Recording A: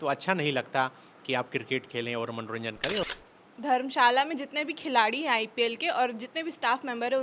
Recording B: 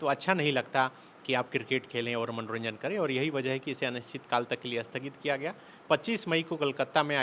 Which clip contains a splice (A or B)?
A